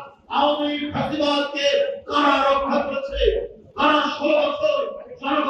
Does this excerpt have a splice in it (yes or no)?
no